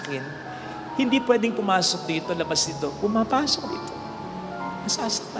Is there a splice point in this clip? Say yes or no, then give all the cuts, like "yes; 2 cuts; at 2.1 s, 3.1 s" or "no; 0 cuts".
no; 0 cuts